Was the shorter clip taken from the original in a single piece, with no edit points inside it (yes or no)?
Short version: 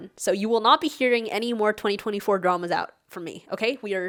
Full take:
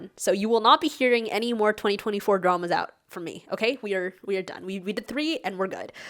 yes